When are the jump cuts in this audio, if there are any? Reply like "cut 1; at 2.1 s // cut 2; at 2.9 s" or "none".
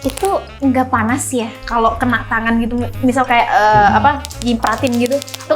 cut 1; at 1.6 s